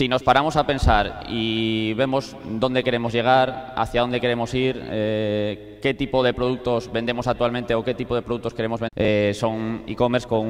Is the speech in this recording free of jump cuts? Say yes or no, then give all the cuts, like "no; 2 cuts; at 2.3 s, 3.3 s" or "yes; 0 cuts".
yes; 0 cuts